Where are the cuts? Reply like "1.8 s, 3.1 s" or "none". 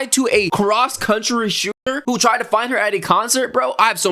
none